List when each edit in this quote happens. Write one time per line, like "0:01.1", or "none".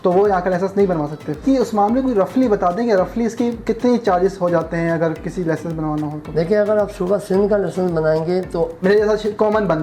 0:01.4
0:08.8